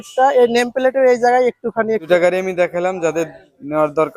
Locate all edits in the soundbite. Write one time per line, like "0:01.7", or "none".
0:02.0